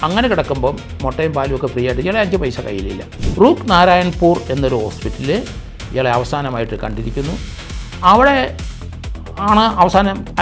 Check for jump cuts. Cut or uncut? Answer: cut